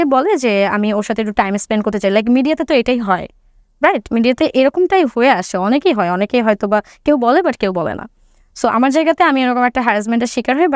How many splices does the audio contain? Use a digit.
0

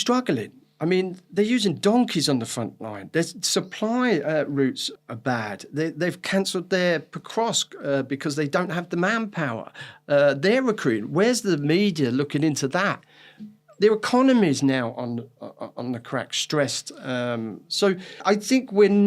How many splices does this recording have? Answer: 2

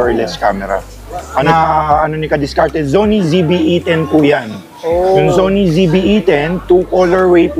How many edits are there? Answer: 1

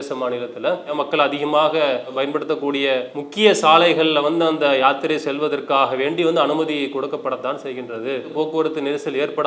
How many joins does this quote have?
3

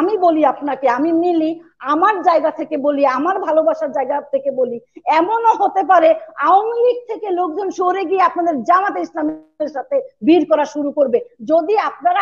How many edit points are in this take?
0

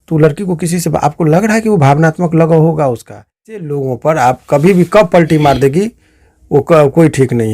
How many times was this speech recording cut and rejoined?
1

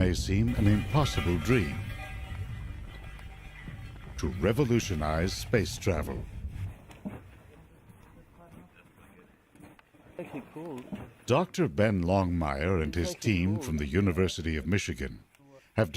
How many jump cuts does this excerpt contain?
1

